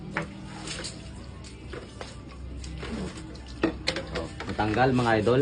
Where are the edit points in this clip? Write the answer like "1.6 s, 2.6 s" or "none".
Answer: none